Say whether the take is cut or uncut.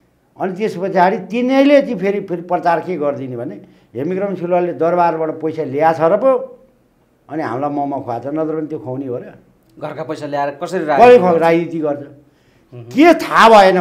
uncut